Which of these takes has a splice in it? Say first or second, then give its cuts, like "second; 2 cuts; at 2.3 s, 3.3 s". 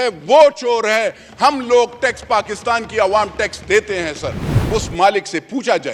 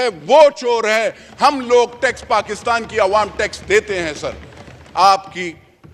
first; 1 cut; at 4.5 s